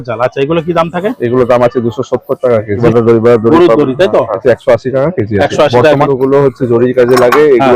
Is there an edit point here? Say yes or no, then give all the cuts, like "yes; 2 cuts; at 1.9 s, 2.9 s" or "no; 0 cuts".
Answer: yes; 3 cuts; at 2.8 s, 4.4 s, 6.1 s